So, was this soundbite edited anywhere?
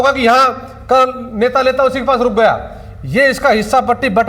no; 0 cuts

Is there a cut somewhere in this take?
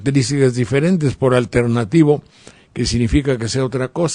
no; 0 cuts

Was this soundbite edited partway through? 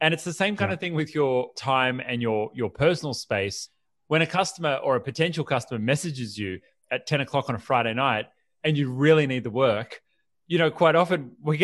no; 0 cuts

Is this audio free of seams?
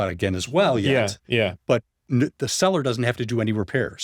yes; 0 cuts

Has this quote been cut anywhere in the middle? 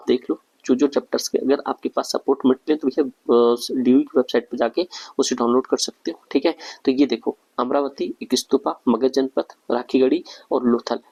no; 0 cuts

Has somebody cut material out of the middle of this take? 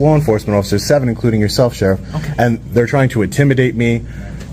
no; 0 cuts

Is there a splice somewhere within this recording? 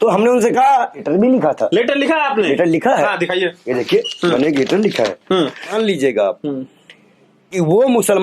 yes; 2 cuts; at 1.0 s, 5.7 s

